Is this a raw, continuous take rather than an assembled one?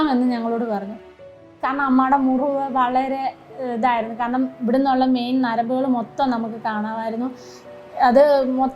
no; 1 cut; at 1.3 s

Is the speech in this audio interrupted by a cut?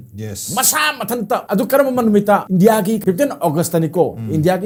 no; 0 cuts

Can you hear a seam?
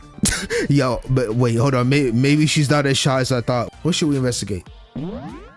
yes; 1 cut; at 3.7 s

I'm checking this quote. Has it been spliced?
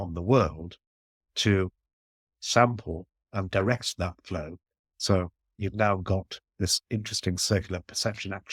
no; 0 cuts

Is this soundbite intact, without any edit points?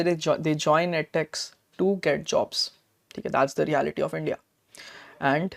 yes; 0 cuts

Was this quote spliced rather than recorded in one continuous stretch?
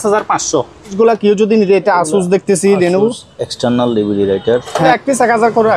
yes; 2 cuts; at 0.9 s, 4.8 s

